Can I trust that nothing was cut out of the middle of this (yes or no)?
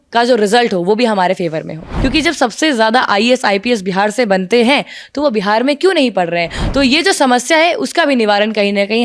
no